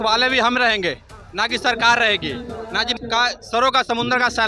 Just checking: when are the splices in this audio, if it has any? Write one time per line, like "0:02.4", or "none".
0:02.9